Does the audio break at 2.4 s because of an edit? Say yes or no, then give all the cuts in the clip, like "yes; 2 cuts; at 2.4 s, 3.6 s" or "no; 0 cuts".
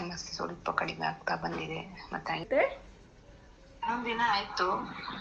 yes; 1 cut; at 2.4 s